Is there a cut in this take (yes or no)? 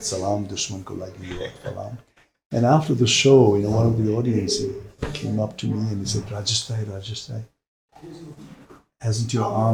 no